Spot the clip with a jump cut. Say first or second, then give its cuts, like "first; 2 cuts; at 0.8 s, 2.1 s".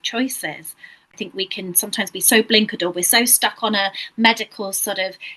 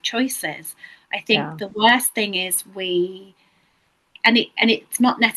first; 1 cut; at 1.1 s